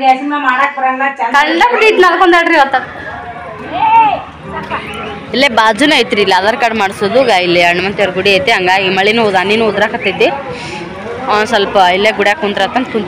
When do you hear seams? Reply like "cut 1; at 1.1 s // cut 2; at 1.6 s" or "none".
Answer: cut 1; at 2.8 s